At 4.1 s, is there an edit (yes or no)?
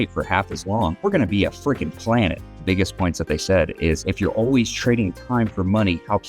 yes